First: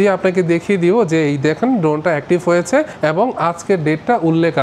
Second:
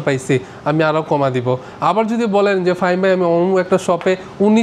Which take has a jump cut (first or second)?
first